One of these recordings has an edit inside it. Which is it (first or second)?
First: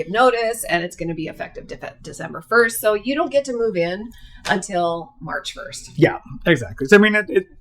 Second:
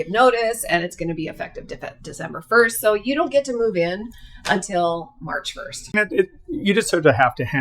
second